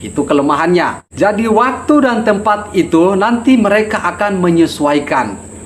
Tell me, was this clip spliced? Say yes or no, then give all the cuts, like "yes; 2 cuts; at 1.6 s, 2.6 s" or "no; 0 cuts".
no; 0 cuts